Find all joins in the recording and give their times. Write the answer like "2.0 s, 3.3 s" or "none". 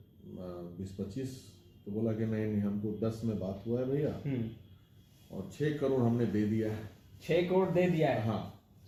none